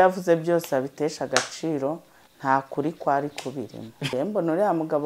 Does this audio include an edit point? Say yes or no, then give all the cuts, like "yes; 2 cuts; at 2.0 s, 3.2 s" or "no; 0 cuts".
yes; 1 cut; at 4.0 s